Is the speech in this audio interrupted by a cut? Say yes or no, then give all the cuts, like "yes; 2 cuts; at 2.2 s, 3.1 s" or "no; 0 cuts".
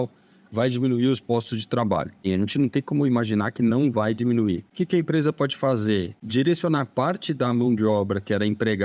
yes; 3 cuts; at 2.3 s, 4.7 s, 6.2 s